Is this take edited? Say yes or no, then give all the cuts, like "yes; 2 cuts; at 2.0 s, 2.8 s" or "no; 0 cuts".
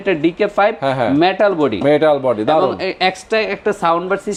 no; 0 cuts